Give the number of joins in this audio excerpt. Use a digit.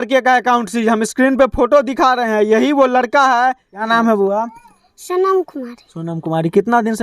1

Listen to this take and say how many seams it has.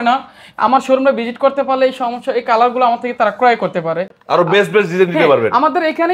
0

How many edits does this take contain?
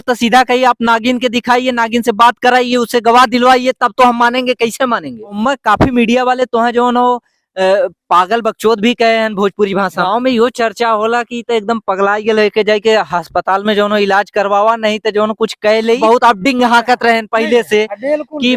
3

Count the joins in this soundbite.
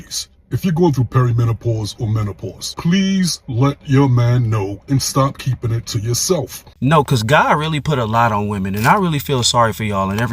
1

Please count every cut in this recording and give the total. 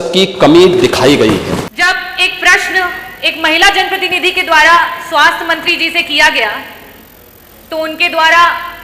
1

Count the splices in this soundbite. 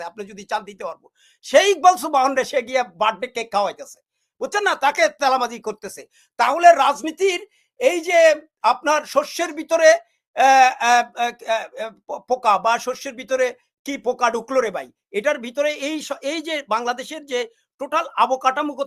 0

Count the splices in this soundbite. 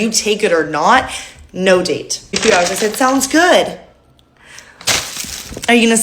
1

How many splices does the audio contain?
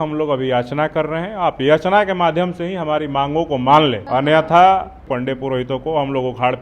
2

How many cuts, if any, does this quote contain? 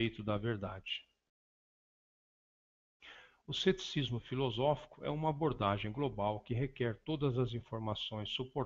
1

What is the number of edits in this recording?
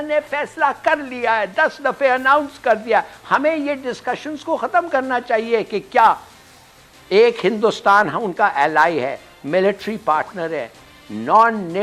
0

